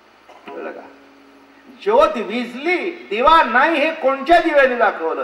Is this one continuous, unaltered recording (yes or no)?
yes